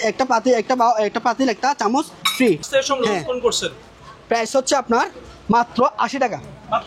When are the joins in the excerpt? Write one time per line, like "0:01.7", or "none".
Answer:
0:02.6